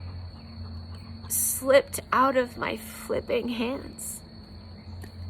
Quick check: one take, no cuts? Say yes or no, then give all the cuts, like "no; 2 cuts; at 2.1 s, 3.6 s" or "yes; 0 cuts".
yes; 0 cuts